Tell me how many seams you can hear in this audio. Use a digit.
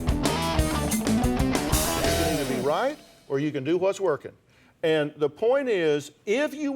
1